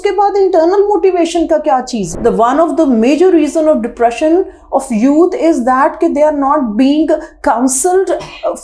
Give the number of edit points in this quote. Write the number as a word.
one